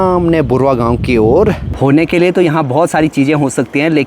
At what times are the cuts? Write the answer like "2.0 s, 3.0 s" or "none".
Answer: 1.7 s